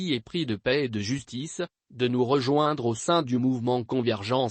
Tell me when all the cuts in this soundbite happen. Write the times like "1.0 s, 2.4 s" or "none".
1.7 s